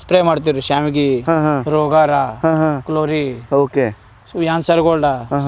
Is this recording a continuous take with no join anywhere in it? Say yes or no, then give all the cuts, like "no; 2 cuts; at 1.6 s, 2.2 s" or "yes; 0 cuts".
yes; 0 cuts